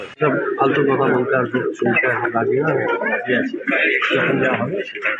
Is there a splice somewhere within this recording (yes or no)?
no